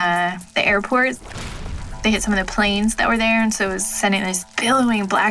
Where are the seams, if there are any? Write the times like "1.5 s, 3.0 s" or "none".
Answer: none

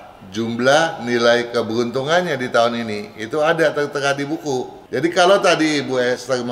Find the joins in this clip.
4.8 s

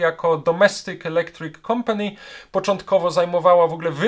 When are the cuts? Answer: none

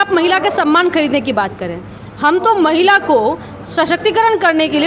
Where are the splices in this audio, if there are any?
none

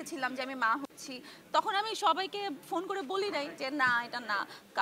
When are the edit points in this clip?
none

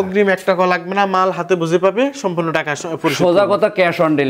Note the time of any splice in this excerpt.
none

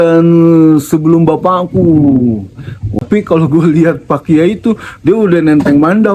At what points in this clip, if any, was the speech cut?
3.0 s

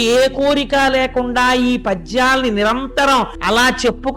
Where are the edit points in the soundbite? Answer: 3.1 s

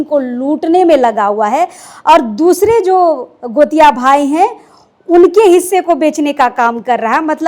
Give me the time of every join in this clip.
none

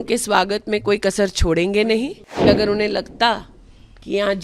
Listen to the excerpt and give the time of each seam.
2.5 s

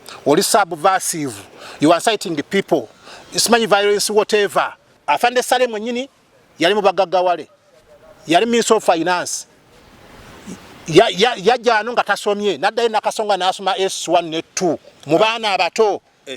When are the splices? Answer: 4.8 s

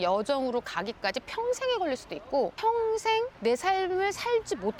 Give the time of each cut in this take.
3.3 s

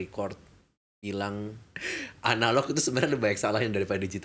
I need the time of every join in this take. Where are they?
1.7 s

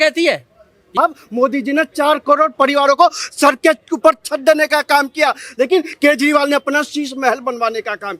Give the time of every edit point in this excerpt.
1.0 s

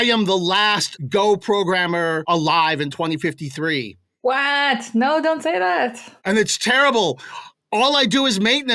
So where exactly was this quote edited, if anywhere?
0.9 s, 2.2 s

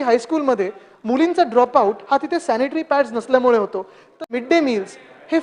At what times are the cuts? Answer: 4.2 s

